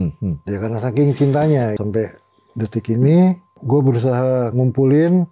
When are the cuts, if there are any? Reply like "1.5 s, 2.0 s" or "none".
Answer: 1.8 s, 3.5 s